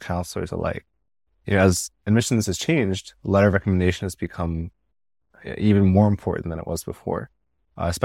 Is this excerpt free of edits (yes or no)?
yes